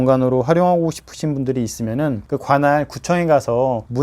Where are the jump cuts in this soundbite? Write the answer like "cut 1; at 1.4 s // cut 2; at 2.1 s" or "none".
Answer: cut 1; at 2.2 s